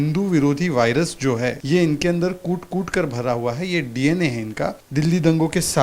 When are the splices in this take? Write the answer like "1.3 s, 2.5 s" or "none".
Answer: 1.6 s, 4.8 s